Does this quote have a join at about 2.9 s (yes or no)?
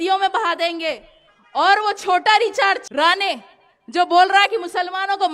yes